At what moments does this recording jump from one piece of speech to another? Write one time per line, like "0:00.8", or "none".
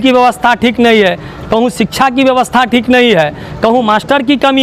none